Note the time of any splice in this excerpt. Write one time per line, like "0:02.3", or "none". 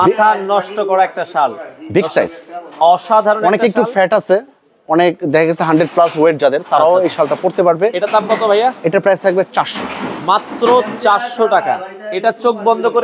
none